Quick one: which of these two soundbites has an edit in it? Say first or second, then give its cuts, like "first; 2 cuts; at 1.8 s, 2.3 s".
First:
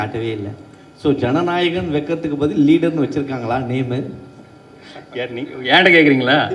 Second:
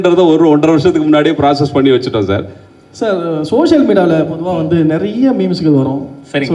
second; 1 cut; at 2.6 s